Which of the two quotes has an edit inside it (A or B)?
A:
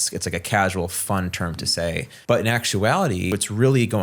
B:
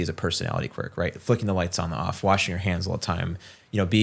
A